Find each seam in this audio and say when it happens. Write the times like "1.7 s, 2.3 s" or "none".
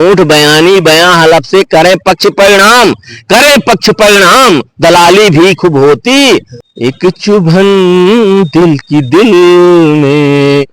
6.6 s